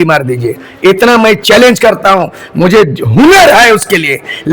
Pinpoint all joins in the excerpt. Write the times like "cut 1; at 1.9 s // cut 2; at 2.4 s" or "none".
none